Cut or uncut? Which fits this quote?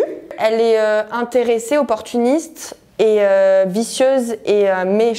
uncut